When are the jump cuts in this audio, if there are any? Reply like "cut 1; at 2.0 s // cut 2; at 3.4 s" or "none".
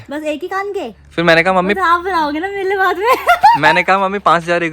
cut 1; at 1.0 s